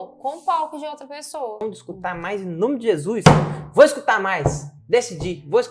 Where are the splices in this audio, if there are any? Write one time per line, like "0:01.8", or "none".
0:01.6